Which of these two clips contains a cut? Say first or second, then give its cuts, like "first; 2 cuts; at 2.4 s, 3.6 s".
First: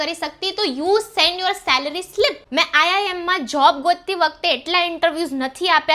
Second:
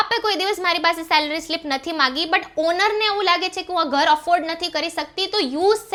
first; 1 cut; at 2.4 s